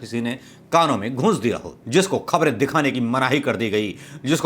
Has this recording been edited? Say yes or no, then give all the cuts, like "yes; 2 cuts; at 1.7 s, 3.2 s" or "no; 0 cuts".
yes; 1 cut; at 1.7 s